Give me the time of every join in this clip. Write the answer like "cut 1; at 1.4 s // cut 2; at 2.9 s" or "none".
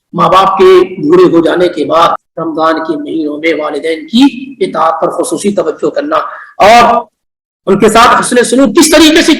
cut 1; at 2.2 s

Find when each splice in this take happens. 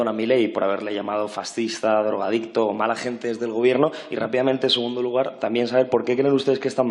none

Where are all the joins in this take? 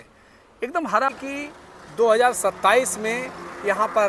cut 1; at 1.1 s

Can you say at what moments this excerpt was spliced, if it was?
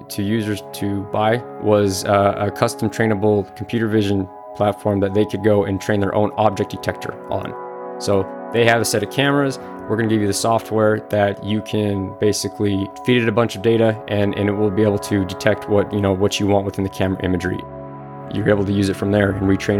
cut 1; at 12.9 s // cut 2; at 18.1 s

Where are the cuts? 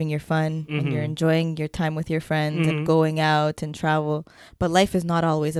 none

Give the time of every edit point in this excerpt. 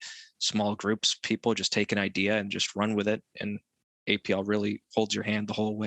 none

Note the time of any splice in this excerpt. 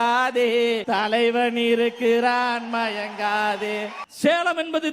cut 1; at 4.0 s

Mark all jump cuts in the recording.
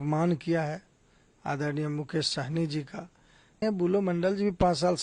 cut 1; at 3.6 s

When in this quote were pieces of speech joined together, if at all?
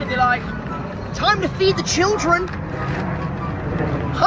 none

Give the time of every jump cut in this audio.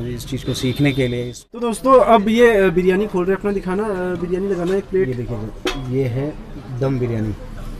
cut 1; at 1.6 s

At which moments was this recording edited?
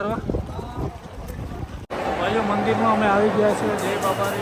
cut 1; at 1.9 s

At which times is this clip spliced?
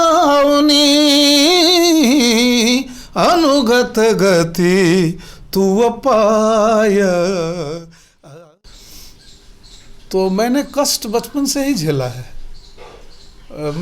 cut 1; at 8.2 s

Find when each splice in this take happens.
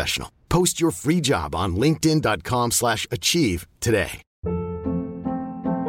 cut 1; at 4.2 s

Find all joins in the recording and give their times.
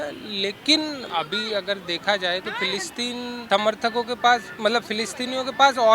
cut 1; at 1.0 s // cut 2; at 3.4 s

